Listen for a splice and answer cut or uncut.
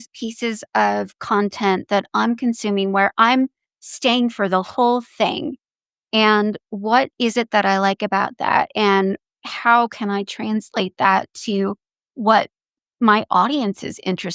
uncut